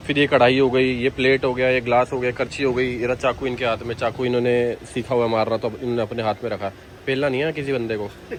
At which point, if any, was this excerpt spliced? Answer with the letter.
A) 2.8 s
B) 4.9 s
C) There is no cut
C